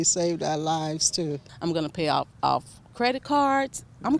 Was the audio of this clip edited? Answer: yes; 1 cut; at 1.5 s

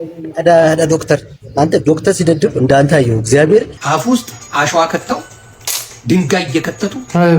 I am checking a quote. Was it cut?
yes; 1 cut; at 3.8 s

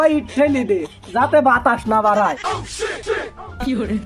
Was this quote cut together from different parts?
yes; 1 cut; at 3.0 s

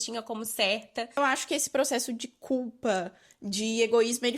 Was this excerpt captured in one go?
no; 1 cut; at 1.2 s

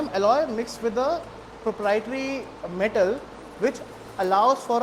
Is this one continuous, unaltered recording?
yes; 0 cuts

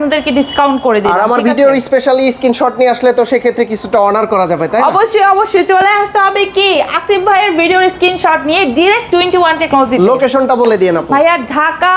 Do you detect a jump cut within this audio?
no; 0 cuts

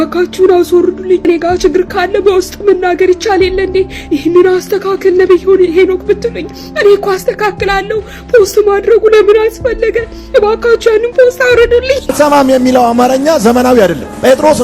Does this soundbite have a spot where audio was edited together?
yes; 2 cuts; at 1.2 s, 12.1 s

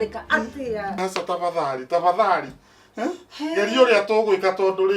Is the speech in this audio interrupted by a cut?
yes; 1 cut; at 1.0 s

